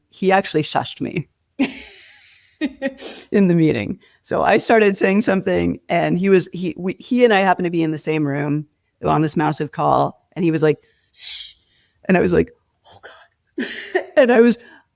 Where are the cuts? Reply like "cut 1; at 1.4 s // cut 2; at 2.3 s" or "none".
none